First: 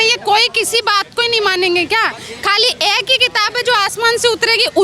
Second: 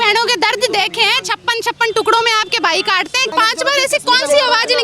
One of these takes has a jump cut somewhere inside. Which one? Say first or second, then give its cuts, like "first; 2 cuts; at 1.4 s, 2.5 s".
second; 1 cut; at 3.3 s